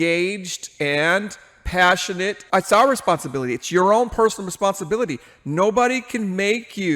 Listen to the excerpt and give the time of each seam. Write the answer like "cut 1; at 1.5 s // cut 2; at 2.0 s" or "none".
cut 1; at 2.4 s